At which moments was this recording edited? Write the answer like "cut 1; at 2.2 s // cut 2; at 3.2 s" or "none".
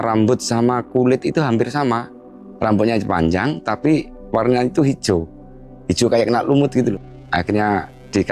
cut 1; at 6.9 s